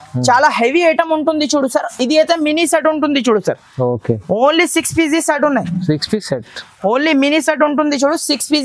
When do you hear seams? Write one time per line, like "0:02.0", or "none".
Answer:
none

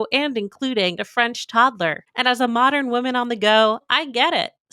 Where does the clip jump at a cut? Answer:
0:01.0

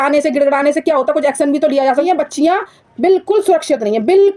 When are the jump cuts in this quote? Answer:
0:02.1

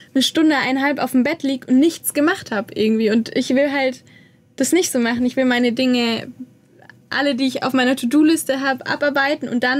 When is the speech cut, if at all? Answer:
none

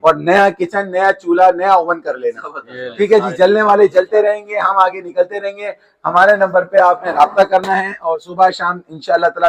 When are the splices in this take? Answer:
none

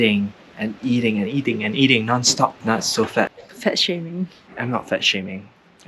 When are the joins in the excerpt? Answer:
0:02.6
0:03.5

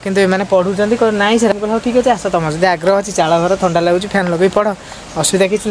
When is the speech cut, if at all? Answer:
0:01.5

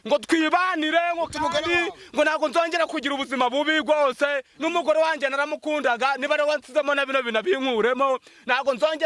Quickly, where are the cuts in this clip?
none

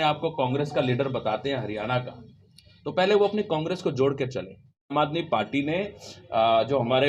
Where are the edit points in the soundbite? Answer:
0:04.9

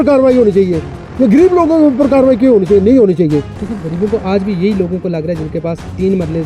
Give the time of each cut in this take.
0:03.6

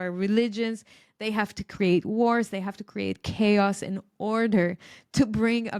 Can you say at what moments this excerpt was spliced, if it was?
none

